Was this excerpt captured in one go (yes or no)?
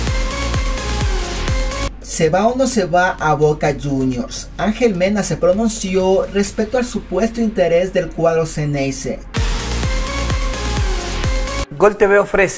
no